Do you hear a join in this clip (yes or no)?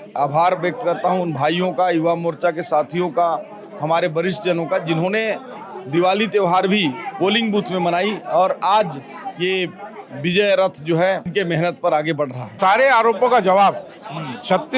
yes